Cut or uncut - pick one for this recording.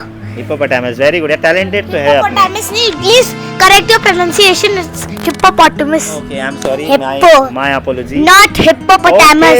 uncut